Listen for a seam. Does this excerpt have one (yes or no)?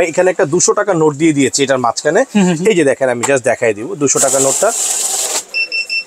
no